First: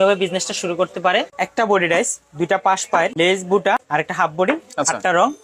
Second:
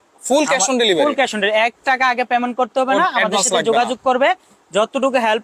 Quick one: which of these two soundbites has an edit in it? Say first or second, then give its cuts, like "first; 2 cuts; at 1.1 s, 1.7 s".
first; 3 cuts; at 1.4 s, 3.1 s, 3.8 s